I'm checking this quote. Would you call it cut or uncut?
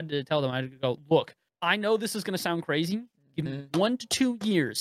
cut